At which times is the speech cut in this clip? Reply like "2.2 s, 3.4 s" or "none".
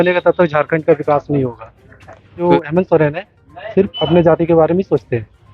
2.5 s